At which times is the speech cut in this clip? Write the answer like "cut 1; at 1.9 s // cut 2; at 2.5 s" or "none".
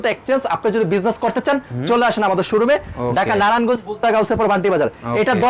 none